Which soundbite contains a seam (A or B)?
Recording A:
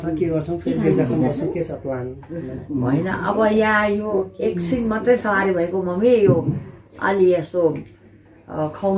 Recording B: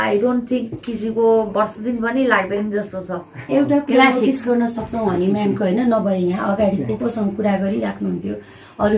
B